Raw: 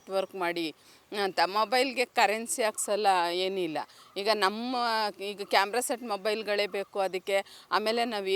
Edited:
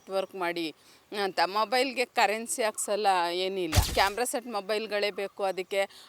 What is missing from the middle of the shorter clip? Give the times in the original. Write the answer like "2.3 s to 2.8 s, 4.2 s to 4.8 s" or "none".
3.9 s to 5.4 s